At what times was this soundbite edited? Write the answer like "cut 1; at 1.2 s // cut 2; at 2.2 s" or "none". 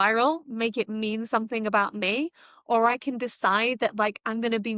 none